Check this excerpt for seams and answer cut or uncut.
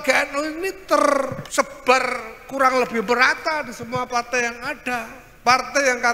cut